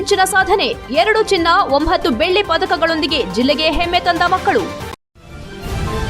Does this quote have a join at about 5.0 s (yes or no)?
yes